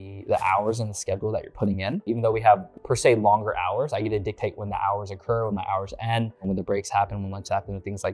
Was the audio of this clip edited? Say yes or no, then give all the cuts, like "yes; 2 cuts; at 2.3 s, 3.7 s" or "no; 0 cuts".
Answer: no; 0 cuts